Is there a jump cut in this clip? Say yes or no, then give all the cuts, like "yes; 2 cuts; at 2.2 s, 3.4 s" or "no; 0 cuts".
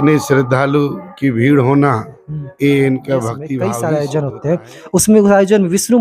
yes; 1 cut; at 3.5 s